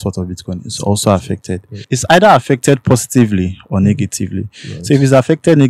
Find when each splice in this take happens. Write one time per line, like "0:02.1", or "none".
0:01.9